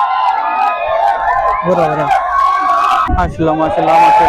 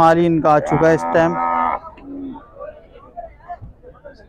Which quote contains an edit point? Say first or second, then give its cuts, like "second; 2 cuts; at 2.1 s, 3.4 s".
first; 1 cut; at 3.1 s